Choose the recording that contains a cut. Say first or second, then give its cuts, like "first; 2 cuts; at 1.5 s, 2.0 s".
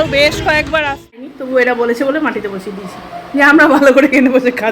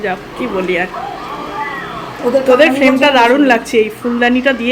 first; 1 cut; at 1.3 s